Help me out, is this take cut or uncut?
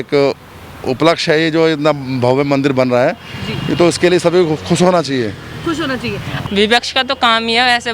cut